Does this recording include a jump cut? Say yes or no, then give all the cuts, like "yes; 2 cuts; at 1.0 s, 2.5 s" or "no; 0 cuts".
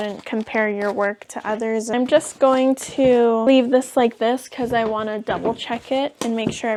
no; 0 cuts